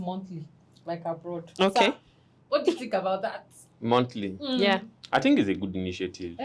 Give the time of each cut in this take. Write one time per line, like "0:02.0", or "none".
0:04.9